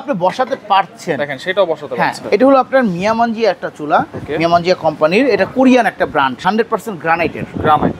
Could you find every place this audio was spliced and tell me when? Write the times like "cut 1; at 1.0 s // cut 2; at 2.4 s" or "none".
cut 1; at 2.2 s // cut 2; at 6.4 s